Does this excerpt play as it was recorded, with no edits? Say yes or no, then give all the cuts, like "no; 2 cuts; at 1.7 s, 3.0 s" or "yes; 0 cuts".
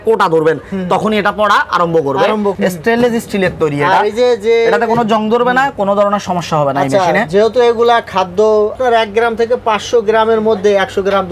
no; 2 cuts; at 2.5 s, 8.8 s